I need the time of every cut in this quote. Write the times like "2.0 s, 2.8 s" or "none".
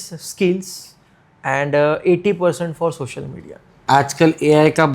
3.7 s